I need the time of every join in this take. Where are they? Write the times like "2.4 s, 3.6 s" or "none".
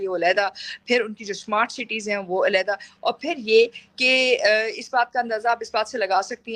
none